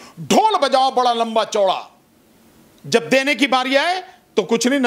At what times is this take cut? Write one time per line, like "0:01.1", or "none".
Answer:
none